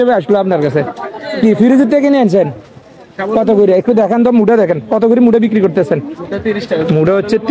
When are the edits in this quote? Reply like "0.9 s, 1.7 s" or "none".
none